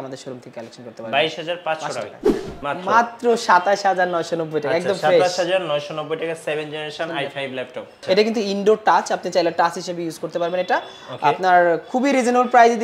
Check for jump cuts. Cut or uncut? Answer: cut